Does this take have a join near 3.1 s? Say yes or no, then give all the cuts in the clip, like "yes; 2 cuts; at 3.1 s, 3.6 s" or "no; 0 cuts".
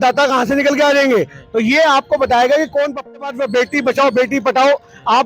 yes; 1 cut; at 3.1 s